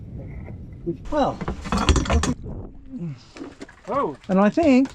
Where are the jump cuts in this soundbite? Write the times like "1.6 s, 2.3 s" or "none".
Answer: 1.0 s, 2.3 s